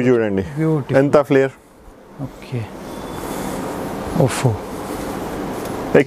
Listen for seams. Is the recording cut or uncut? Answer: uncut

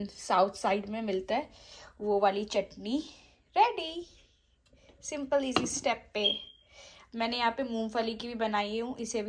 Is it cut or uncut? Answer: uncut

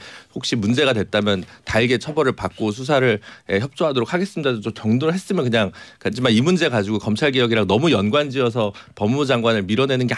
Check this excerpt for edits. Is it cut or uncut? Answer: uncut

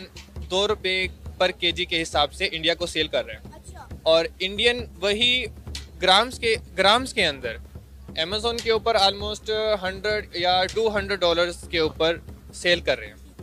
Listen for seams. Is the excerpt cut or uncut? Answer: uncut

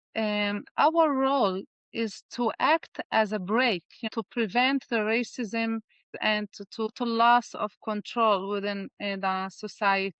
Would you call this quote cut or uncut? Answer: cut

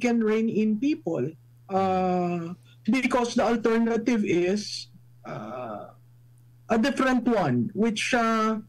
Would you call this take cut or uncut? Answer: uncut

